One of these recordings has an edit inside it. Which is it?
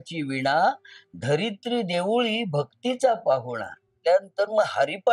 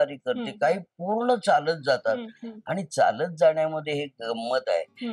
first; 1 cut; at 4.0 s

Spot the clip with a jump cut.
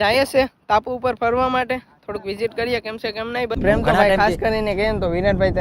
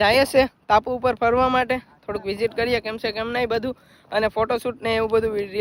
first; 1 cut; at 3.6 s

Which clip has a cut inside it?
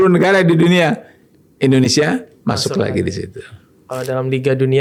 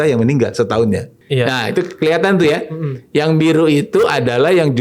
second; 1 cut; at 1.2 s

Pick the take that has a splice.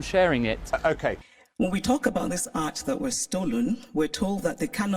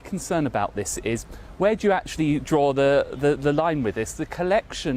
first; 1 cut; at 1.3 s

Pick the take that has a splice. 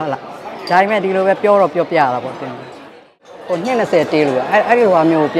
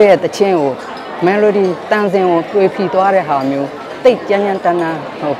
first; 1 cut; at 3.1 s

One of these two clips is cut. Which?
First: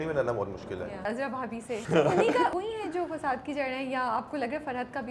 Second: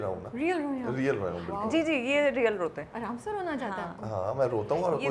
first; 2 cuts; at 1.2 s, 2.5 s

